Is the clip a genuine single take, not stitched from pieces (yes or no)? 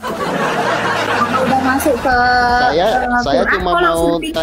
yes